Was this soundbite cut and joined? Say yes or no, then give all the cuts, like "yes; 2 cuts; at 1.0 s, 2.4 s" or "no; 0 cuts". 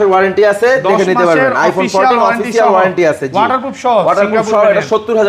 no; 0 cuts